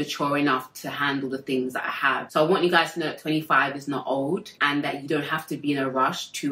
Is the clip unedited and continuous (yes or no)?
yes